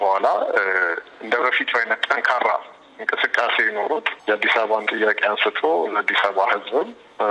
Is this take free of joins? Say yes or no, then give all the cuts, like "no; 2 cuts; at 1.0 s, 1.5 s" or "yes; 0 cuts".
yes; 0 cuts